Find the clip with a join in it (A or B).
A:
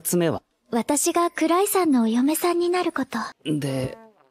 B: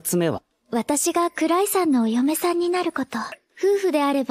A